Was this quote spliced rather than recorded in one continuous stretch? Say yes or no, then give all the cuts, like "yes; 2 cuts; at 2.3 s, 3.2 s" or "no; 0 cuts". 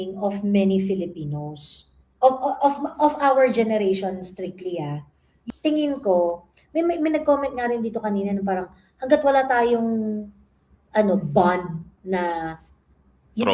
yes; 1 cut; at 5.4 s